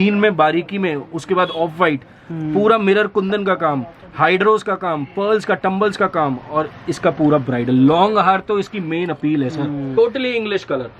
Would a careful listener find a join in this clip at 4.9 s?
no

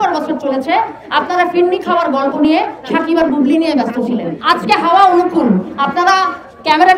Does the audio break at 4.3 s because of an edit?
yes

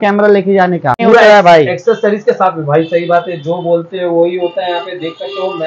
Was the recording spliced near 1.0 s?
yes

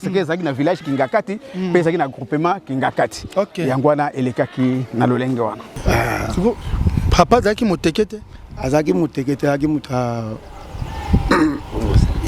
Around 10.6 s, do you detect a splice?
no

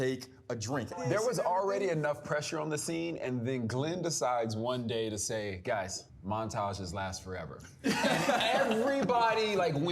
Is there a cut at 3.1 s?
no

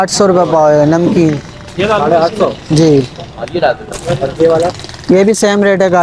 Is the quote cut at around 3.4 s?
no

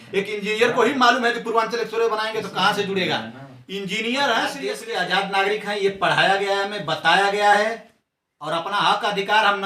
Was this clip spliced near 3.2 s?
no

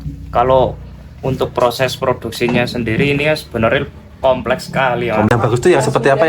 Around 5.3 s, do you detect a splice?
yes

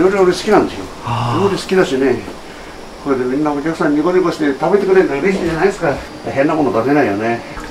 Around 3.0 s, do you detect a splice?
no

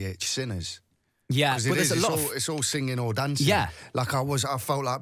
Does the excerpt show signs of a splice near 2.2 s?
no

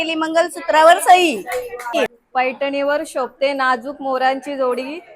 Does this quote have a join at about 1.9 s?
yes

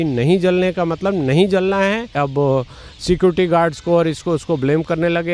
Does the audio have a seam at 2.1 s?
yes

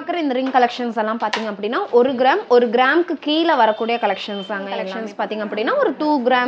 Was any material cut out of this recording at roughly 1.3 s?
no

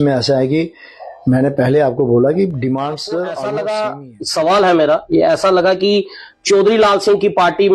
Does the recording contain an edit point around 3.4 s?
yes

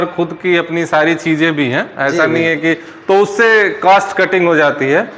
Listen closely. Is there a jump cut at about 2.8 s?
no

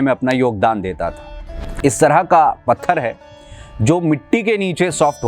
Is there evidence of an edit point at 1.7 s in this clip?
yes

